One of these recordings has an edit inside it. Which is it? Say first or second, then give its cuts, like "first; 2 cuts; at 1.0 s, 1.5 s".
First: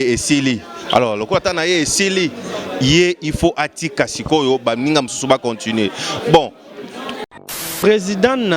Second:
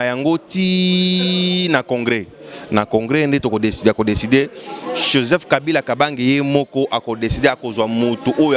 first; 1 cut; at 7.6 s